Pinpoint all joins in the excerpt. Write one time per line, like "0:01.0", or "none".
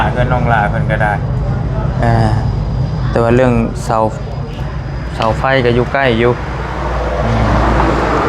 none